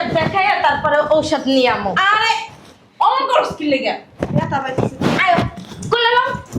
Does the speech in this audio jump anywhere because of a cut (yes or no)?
no